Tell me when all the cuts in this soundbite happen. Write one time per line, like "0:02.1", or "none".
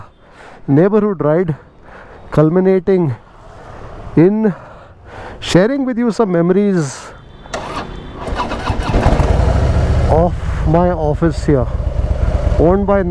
none